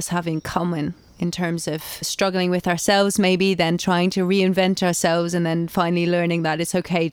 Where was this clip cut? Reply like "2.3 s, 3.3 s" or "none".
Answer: 2.1 s